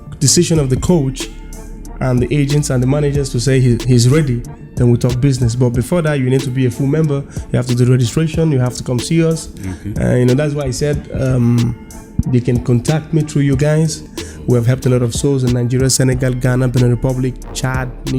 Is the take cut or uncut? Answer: cut